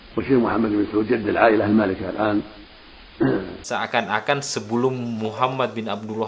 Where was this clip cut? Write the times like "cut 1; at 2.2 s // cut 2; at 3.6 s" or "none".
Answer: cut 1; at 3.6 s